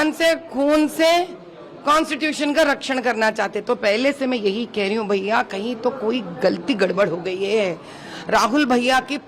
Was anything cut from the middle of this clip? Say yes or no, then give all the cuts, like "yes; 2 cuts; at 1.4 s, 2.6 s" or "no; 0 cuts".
no; 0 cuts